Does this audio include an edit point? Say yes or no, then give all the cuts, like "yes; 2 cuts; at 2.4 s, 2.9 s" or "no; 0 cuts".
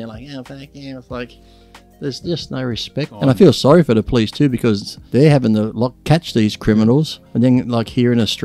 yes; 4 cuts; at 3.1 s, 4.9 s, 6.0 s, 7.2 s